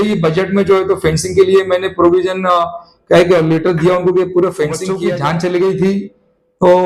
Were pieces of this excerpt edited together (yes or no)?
yes